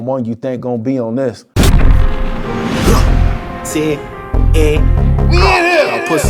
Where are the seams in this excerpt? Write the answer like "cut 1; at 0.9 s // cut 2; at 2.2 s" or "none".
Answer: cut 1; at 1.4 s